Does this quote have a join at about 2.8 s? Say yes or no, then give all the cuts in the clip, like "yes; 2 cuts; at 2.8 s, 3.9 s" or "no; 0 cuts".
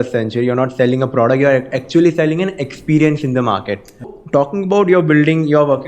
no; 1 cut; at 4.1 s